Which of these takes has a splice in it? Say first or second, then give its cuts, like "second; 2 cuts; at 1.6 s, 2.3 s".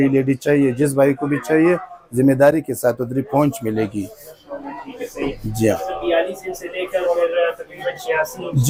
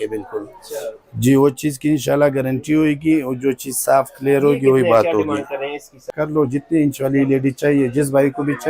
second; 1 cut; at 6.1 s